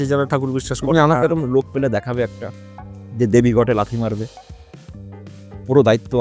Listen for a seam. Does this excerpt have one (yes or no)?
no